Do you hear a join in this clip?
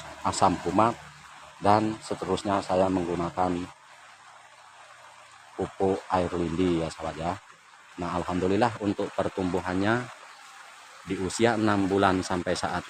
no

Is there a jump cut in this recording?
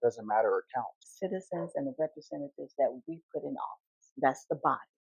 yes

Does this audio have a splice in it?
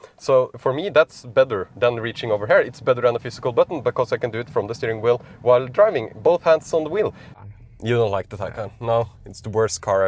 yes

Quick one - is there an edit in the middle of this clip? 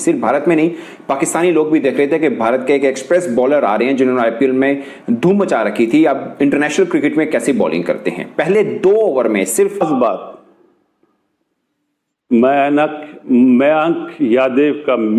yes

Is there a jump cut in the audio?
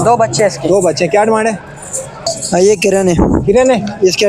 yes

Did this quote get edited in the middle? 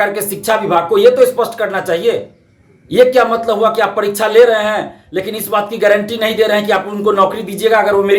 no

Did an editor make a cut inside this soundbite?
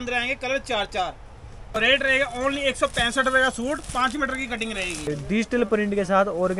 yes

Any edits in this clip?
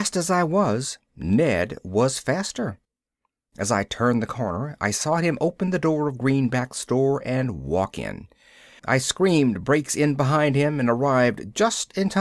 yes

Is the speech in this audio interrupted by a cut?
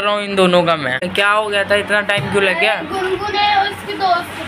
yes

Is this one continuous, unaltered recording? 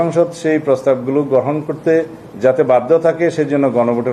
yes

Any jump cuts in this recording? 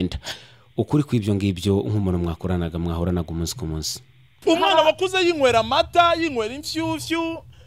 yes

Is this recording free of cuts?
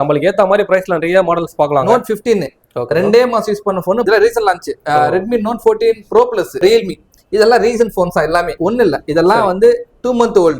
no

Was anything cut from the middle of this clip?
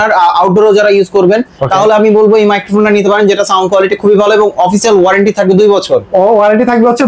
no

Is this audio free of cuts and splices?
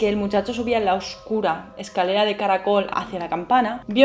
no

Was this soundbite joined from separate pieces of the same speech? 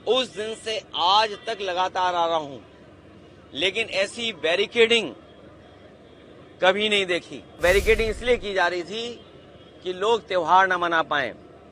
yes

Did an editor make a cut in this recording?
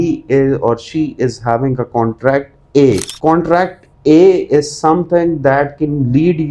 yes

